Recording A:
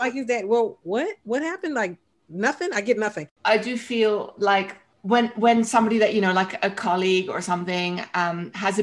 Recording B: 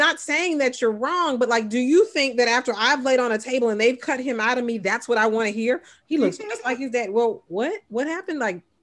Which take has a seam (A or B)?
A